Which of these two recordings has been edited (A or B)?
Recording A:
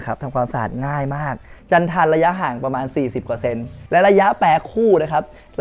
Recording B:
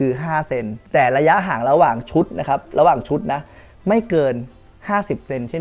A